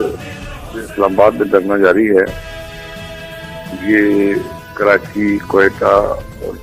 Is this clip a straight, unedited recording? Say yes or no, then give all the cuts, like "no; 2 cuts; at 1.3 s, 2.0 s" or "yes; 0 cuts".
yes; 0 cuts